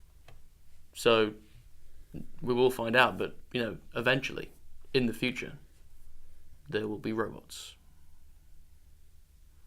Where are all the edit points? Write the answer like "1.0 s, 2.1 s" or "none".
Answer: 5.8 s